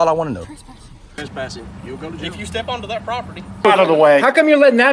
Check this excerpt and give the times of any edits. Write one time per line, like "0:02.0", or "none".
0:01.1
0:03.6